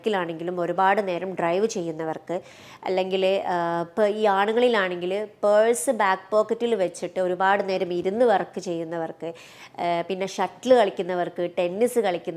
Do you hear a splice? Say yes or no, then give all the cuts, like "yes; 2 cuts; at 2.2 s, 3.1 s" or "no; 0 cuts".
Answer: no; 0 cuts